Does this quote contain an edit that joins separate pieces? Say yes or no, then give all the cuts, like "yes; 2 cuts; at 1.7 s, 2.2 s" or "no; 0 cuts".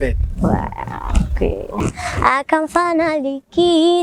yes; 1 cut; at 1.8 s